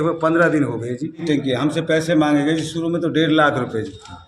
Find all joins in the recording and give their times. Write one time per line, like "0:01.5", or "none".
0:01.2